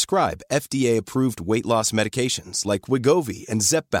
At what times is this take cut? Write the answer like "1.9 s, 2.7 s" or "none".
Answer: none